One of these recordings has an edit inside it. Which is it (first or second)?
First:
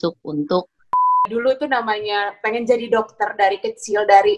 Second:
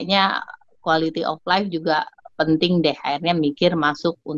first